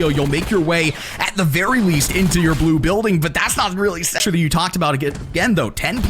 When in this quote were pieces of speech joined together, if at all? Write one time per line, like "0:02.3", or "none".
0:04.2

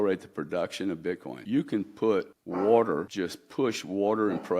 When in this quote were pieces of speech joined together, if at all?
0:01.3
0:02.4
0:03.1

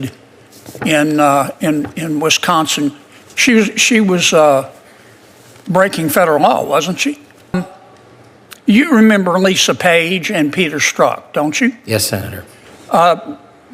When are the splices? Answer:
0:07.5

